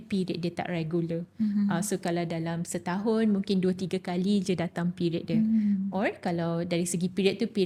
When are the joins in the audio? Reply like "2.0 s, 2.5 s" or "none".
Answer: none